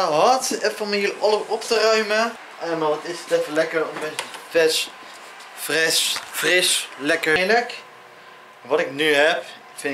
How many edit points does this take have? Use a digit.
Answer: 2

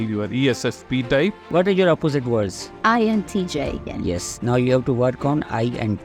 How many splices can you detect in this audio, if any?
3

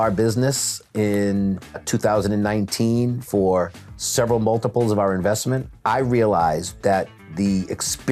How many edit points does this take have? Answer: 2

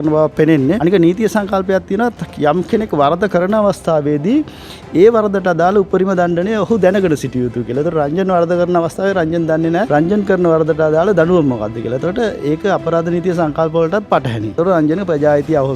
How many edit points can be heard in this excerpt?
3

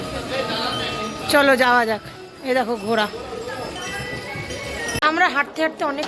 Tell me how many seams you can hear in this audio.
1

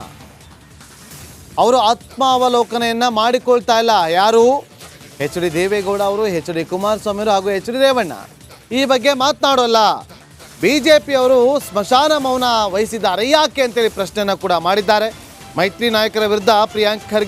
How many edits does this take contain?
1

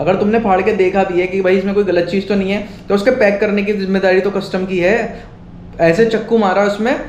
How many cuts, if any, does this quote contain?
0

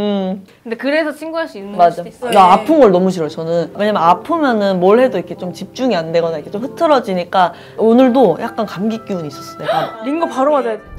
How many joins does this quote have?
3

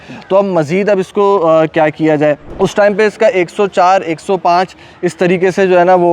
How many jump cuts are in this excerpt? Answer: 1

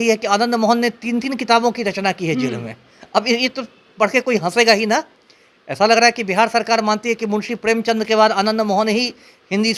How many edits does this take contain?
0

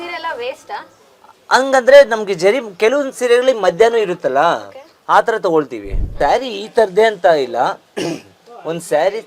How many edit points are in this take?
1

